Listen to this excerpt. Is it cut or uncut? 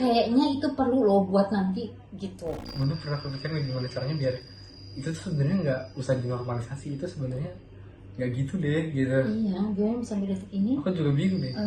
cut